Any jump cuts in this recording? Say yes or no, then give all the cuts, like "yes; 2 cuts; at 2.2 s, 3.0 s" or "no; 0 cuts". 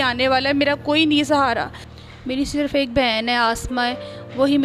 yes; 1 cut; at 1.9 s